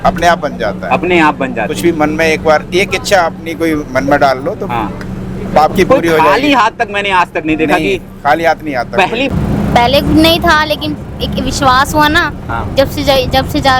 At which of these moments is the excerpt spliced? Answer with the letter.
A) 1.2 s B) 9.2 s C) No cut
B